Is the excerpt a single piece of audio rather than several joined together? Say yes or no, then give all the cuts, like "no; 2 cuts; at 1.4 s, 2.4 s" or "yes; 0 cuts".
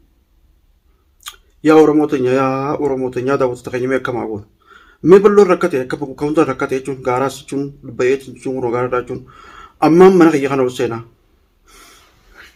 yes; 0 cuts